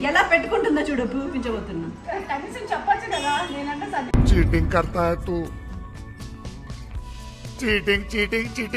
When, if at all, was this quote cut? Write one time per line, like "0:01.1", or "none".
none